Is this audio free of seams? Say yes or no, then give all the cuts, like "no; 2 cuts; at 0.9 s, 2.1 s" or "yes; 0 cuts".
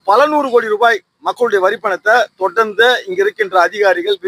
yes; 0 cuts